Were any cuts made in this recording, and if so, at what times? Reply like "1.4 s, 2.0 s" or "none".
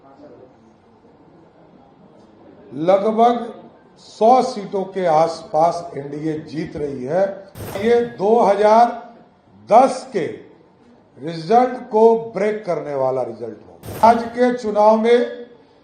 7.8 s, 14.0 s